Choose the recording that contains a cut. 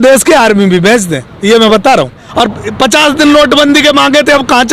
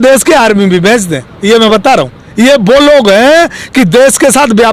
first; 1 cut; at 2.2 s

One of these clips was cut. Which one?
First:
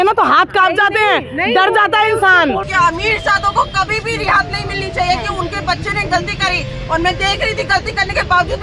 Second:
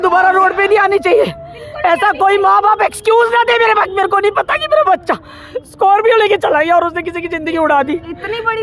first; 1 cut; at 2.6 s

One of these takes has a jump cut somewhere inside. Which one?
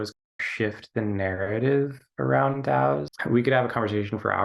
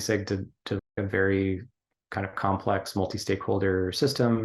first; 1 cut; at 3.1 s

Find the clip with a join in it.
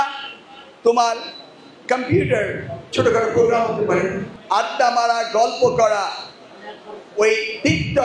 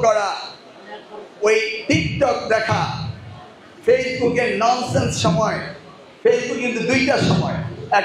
first; 1 cut; at 4.3 s

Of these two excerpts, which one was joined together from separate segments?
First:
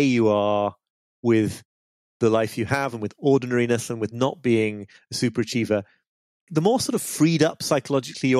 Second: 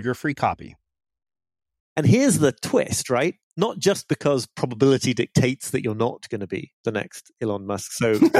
second; 1 cut; at 1.8 s

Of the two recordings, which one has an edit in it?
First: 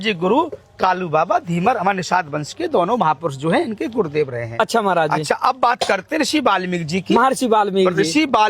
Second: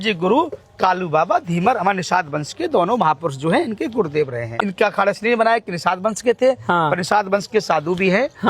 second; 1 cut; at 4.5 s

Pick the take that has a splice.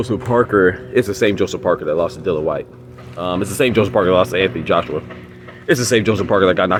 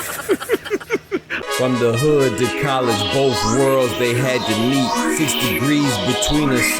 second; 1 cut; at 1.3 s

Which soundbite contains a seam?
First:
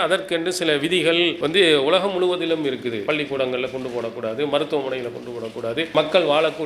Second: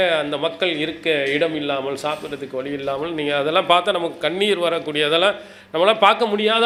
first; 3 cuts; at 1.4 s, 3.0 s, 5.9 s

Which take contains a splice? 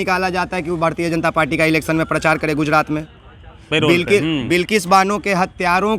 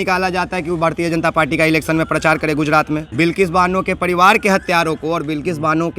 second; 1 cut; at 3.1 s

